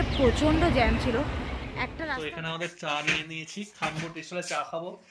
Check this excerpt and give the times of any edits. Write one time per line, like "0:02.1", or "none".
0:02.1